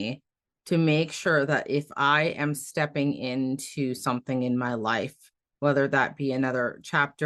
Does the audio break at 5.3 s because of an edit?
no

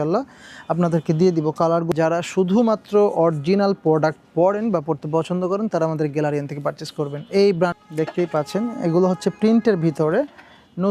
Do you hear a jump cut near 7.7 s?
yes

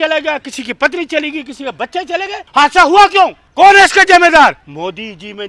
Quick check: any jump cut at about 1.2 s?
no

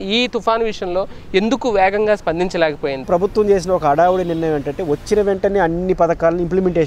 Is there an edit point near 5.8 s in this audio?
no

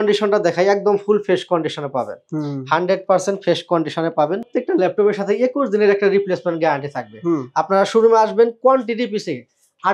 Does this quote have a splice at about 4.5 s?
yes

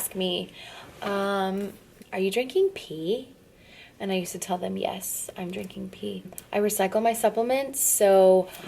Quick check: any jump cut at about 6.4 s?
yes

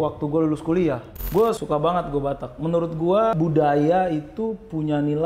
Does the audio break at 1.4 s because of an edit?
yes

